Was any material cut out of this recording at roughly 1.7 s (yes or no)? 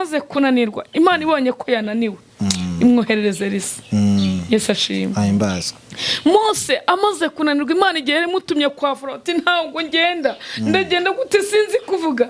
no